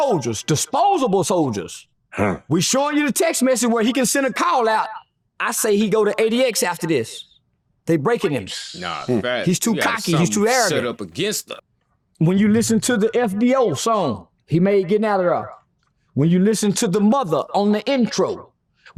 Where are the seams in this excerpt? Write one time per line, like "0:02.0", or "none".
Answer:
none